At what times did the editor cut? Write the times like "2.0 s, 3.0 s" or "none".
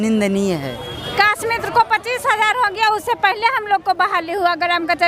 1.1 s